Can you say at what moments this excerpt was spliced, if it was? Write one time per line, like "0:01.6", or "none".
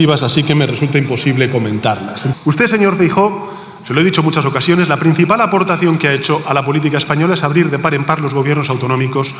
0:02.3